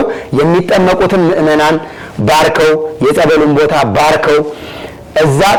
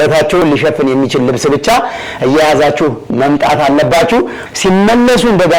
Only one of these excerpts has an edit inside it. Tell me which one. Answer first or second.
second